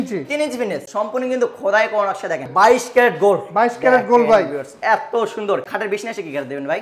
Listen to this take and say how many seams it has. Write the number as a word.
three